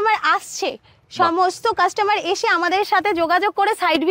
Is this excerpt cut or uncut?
uncut